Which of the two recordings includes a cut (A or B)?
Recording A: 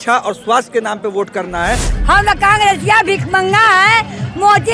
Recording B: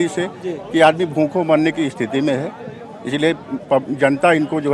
A